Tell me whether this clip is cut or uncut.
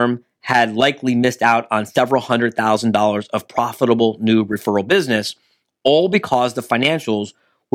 uncut